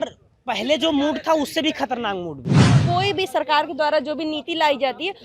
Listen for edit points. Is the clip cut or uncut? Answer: cut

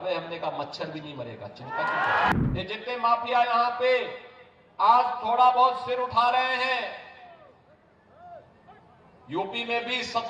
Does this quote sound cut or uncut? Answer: cut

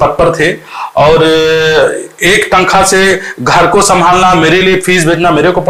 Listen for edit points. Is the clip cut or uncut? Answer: uncut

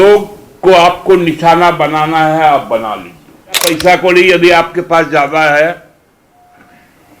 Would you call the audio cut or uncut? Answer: cut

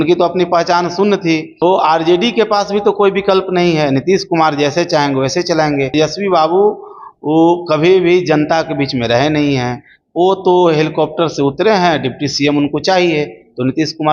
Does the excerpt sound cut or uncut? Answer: cut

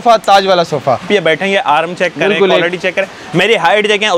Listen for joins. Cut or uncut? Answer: cut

